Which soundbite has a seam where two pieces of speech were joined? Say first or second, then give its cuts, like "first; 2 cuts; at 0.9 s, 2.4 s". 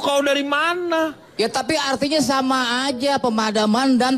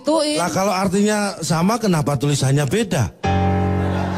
first; 1 cut; at 1.2 s